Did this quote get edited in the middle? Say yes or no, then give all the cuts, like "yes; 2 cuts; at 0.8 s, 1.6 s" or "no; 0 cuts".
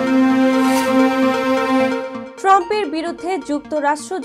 yes; 1 cut; at 2.2 s